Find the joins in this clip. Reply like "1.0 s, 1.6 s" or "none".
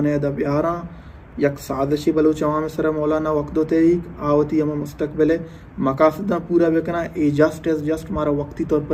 none

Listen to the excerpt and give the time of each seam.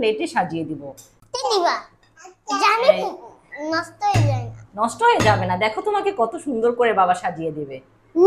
1.2 s

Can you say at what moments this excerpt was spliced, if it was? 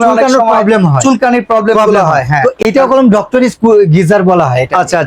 2.6 s

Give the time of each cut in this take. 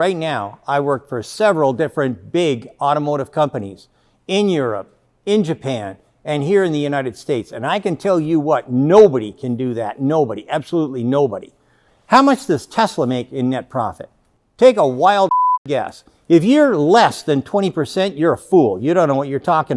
11.8 s, 16.0 s

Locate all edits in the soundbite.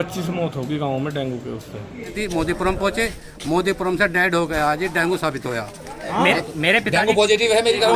2.2 s, 6.1 s

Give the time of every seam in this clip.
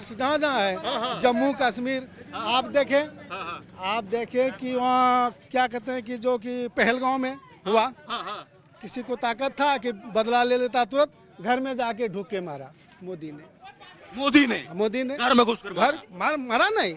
none

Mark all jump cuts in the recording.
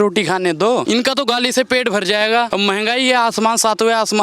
0.8 s, 2.5 s

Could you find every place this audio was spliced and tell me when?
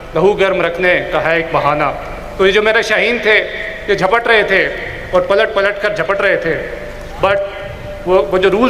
none

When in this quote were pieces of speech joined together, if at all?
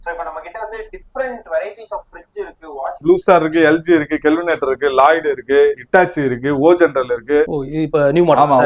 3.0 s, 7.6 s

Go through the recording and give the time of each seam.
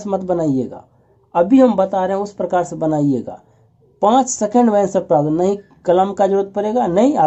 none

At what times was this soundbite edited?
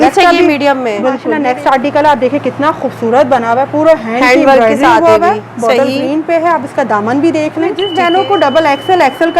1.3 s, 7.8 s

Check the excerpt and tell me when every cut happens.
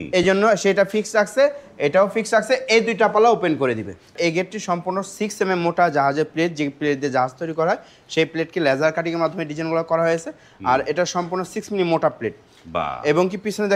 4.1 s

